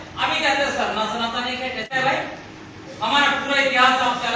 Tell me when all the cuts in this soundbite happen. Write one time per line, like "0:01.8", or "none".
0:01.9